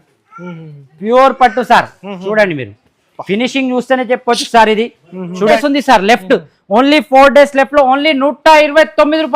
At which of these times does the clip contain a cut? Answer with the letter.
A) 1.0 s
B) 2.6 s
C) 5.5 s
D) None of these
C